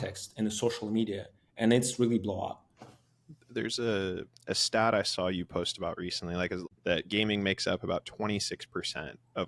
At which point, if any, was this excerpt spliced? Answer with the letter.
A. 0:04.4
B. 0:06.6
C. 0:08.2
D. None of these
B